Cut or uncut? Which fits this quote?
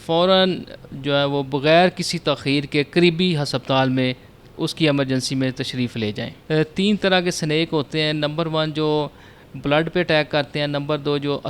cut